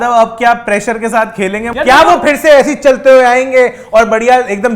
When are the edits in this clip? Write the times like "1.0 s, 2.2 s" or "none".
1.7 s